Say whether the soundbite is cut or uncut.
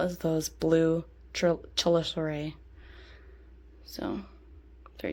uncut